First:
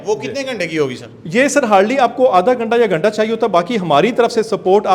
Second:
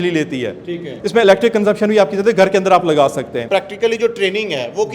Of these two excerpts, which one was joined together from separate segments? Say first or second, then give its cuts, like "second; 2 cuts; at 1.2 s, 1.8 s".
second; 2 cuts; at 0.9 s, 3.4 s